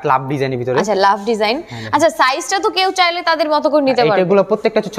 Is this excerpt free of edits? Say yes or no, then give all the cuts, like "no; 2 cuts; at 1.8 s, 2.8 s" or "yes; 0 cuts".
yes; 0 cuts